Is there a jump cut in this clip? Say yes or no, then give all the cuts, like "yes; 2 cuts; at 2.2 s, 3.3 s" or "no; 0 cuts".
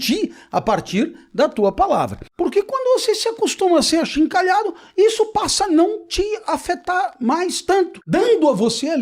yes; 2 cuts; at 2.2 s, 8.0 s